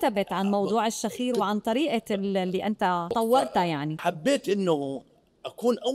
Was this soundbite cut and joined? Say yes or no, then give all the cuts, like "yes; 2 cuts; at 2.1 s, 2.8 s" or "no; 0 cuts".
yes; 2 cuts; at 3.1 s, 4.0 s